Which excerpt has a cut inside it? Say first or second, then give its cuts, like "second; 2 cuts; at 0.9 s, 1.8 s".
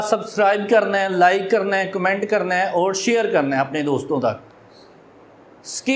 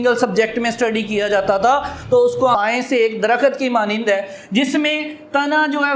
second; 1 cut; at 2.5 s